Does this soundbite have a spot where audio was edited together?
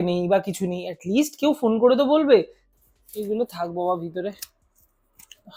yes; 1 cut; at 2.6 s

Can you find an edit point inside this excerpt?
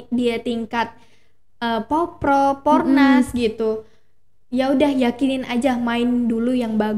no; 0 cuts

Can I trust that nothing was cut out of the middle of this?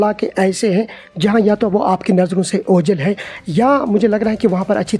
yes; 0 cuts

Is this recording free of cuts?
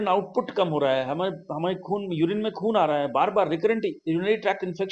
yes; 0 cuts

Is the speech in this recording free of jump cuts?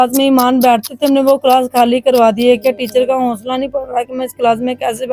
yes; 0 cuts

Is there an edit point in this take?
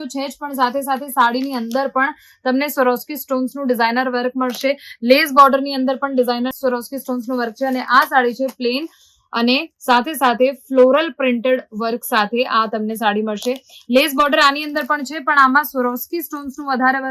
no; 0 cuts

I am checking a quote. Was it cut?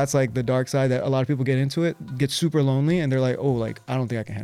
no; 0 cuts

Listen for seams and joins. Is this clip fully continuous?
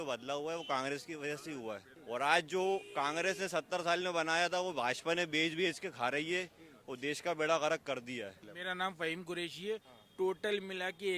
no; 2 cuts; at 1.9 s, 8.5 s

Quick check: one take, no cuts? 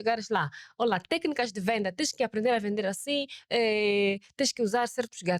yes; 0 cuts

